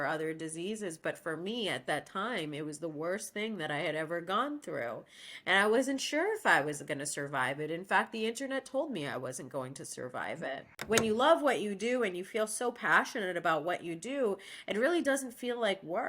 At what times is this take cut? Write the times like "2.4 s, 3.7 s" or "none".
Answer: 10.7 s